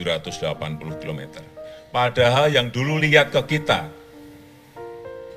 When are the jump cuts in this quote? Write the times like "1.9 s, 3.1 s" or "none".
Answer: 4.1 s